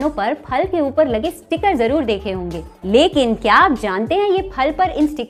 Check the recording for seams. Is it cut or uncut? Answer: uncut